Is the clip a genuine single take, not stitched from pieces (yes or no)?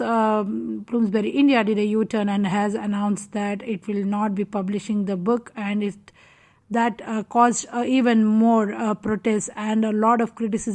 yes